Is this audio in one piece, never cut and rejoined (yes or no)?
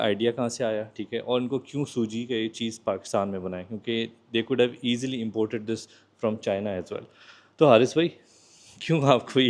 yes